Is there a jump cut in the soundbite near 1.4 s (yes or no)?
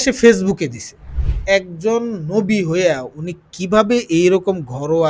yes